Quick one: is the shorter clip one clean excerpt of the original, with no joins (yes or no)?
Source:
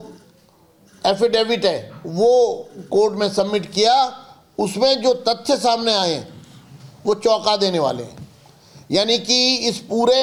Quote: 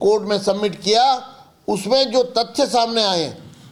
yes